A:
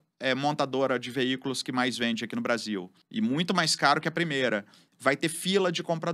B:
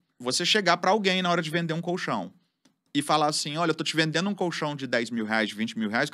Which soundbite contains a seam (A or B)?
A